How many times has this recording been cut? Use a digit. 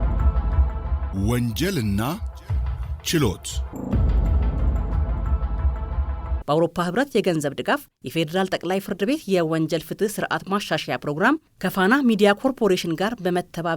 3